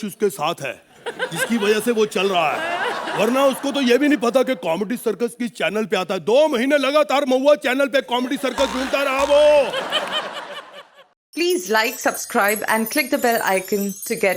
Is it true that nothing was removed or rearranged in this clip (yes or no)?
no